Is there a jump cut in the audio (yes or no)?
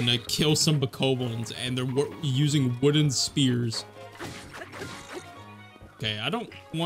no